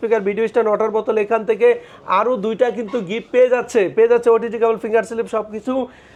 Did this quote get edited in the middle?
no; 0 cuts

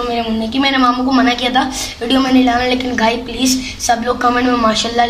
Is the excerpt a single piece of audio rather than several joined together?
yes; 0 cuts

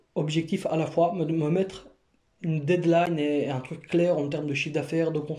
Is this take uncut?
yes; 0 cuts

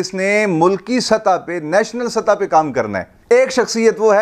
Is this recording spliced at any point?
no; 0 cuts

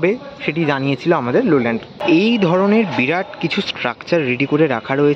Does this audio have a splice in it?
yes; 1 cut; at 1.9 s

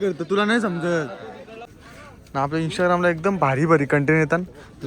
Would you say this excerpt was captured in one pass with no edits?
no; 1 cut; at 1.5 s

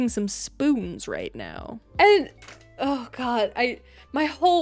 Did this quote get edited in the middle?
yes; 1 cut; at 1.9 s

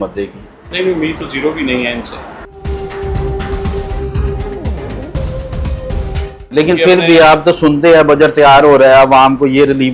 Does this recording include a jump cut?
no; 0 cuts

